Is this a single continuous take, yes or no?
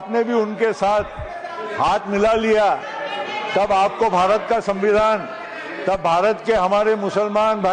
yes